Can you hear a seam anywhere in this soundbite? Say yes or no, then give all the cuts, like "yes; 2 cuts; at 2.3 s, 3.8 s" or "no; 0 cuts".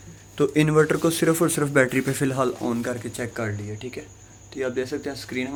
no; 0 cuts